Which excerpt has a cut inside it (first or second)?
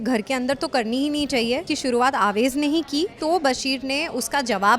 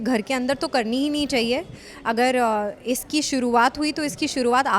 first